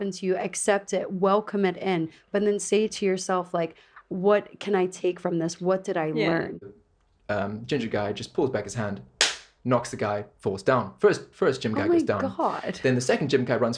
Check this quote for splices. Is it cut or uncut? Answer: cut